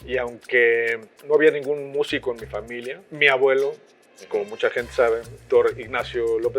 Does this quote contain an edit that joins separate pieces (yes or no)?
yes